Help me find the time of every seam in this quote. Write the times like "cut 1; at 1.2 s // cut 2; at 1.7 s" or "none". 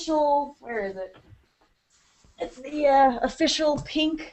cut 1; at 1.9 s